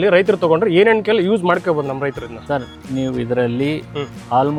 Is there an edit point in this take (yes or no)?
no